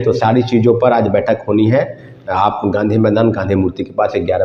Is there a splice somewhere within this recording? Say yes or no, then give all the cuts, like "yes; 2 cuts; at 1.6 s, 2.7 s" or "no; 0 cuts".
no; 0 cuts